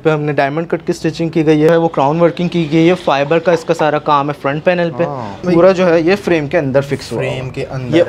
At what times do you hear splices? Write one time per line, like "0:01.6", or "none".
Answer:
0:01.7
0:05.4